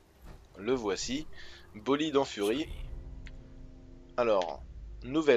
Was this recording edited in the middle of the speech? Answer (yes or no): no